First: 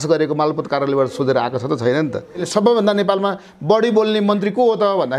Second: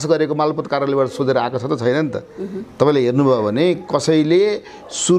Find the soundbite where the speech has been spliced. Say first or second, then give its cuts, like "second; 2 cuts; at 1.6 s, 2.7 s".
first; 1 cut; at 2.4 s